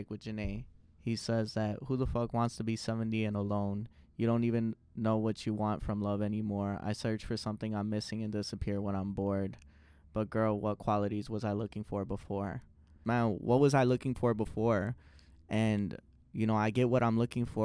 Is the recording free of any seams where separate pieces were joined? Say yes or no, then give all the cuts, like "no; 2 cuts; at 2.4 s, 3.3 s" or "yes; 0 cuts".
no; 1 cut; at 13.0 s